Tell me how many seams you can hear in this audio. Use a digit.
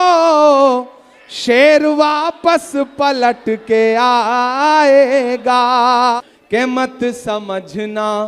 1